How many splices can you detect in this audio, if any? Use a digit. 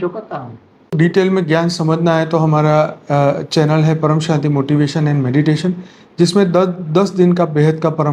1